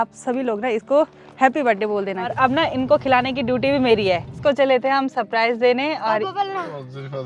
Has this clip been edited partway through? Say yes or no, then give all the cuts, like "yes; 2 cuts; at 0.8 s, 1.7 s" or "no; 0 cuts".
yes; 2 cuts; at 2.3 s, 4.3 s